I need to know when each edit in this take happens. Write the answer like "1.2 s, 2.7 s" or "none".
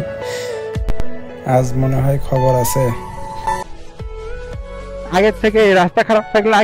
3.6 s